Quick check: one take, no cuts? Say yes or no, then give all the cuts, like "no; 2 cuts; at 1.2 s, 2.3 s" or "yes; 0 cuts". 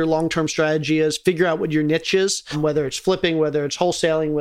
no; 1 cut; at 2.5 s